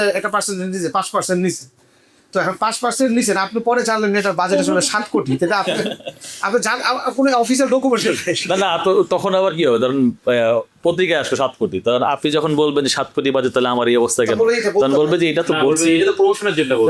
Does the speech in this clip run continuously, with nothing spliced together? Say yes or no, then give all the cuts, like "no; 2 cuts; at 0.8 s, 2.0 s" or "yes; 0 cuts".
yes; 0 cuts